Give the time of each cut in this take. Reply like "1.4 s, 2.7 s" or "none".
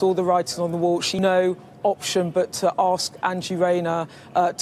1.2 s